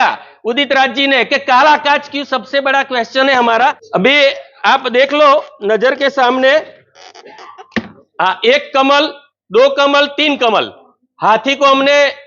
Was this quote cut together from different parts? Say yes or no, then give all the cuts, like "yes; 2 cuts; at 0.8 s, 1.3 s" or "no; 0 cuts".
yes; 1 cut; at 3.8 s